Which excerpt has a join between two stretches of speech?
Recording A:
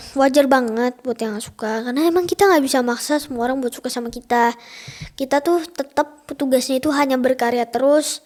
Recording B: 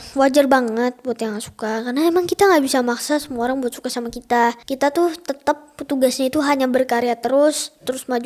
B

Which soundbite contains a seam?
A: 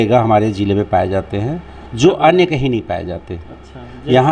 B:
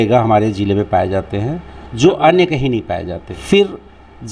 B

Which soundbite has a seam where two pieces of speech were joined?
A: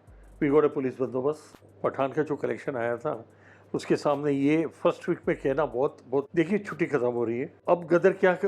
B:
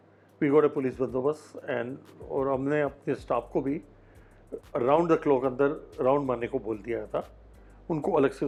A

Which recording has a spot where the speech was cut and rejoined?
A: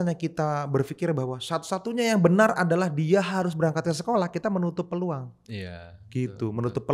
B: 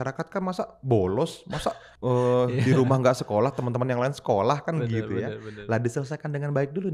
B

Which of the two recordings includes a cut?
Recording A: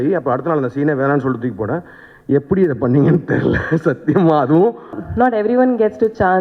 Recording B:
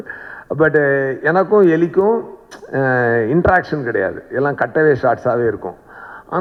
A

